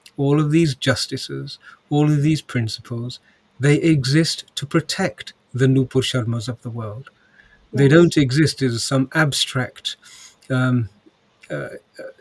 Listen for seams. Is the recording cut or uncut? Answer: uncut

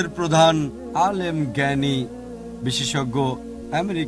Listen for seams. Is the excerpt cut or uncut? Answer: uncut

